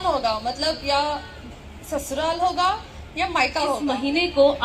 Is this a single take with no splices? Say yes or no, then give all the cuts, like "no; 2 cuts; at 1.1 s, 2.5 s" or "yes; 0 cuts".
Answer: no; 1 cut; at 3.5 s